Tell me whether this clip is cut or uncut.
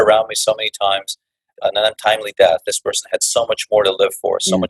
cut